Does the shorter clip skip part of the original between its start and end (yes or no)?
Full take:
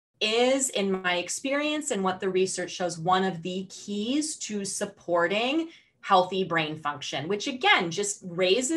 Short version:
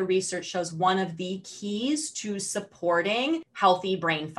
yes